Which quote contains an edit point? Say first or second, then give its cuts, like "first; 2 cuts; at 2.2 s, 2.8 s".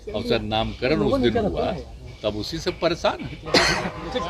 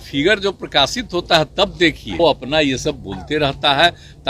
second; 1 cut; at 2.2 s